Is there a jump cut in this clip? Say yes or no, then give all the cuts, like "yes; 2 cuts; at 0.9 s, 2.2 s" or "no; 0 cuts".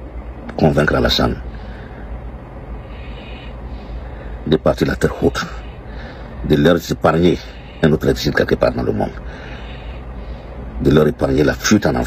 no; 0 cuts